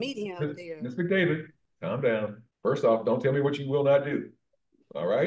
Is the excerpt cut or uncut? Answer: cut